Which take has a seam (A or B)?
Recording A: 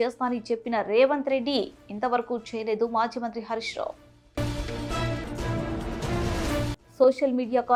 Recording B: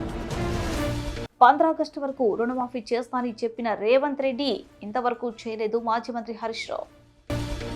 B